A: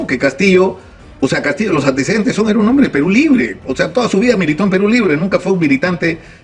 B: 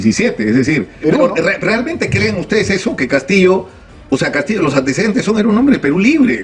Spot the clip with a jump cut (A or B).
B